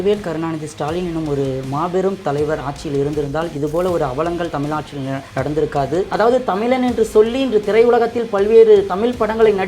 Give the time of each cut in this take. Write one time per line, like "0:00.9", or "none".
0:05.2
0:06.1